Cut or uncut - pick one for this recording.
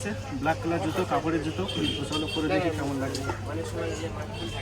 uncut